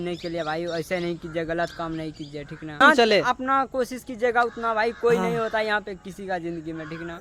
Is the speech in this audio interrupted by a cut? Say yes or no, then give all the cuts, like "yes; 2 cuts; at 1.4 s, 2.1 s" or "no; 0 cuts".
yes; 1 cut; at 2.8 s